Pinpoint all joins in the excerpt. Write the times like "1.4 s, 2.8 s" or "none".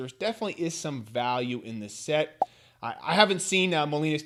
none

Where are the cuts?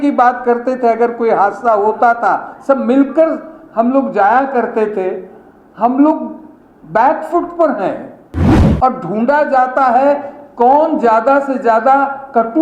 none

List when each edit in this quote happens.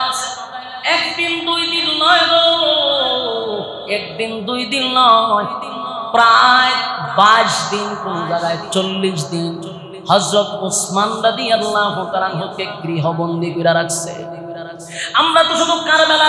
none

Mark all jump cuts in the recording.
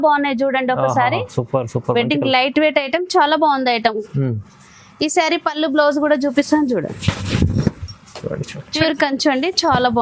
8.6 s

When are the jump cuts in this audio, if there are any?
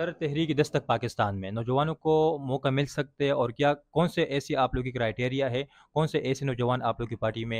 none

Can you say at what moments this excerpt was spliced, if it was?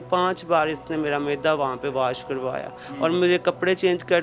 none

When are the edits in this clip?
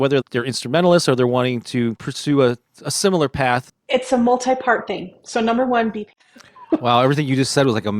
3.7 s, 6.0 s

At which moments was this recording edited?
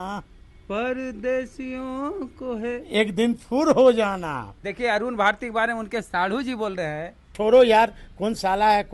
4.6 s, 7.3 s

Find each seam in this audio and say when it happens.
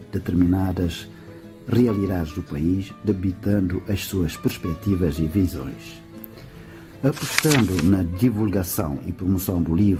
none

